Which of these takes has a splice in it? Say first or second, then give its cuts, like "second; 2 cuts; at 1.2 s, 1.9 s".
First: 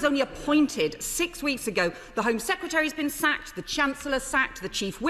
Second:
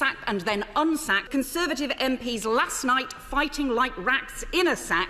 second; 1 cut; at 1.3 s